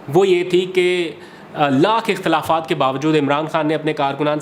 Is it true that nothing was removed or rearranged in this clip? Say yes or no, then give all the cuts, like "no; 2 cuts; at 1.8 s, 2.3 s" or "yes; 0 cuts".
yes; 0 cuts